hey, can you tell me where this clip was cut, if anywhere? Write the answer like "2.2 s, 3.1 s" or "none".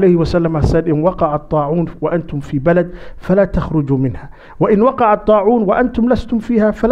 none